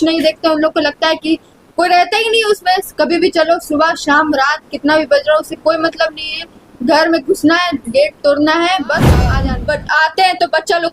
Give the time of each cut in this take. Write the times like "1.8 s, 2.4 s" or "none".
9.3 s